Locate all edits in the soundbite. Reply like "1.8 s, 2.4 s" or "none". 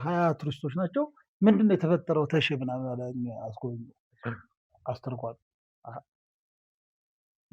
none